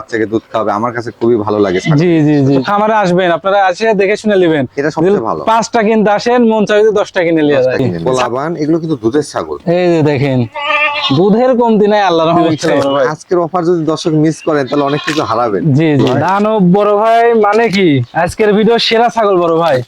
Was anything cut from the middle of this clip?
yes; 4 cuts; at 2.6 s, 7.9 s, 12.4 s, 16.1 s

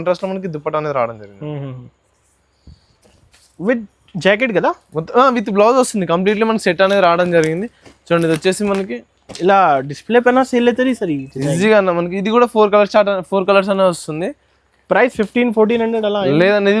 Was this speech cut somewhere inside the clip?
no; 0 cuts

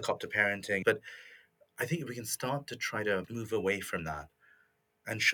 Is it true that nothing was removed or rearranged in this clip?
no; 2 cuts; at 0.7 s, 3.3 s

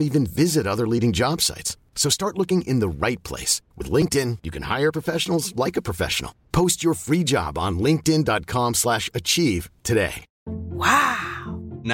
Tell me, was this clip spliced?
yes; 1 cut; at 10.3 s

